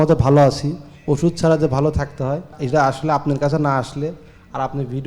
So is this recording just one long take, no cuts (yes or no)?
no